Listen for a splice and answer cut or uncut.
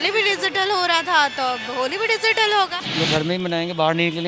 cut